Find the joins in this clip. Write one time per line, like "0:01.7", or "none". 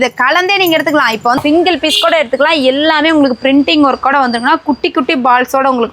0:01.4